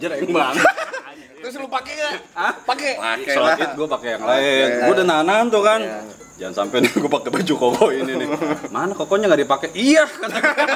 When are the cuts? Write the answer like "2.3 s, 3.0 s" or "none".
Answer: none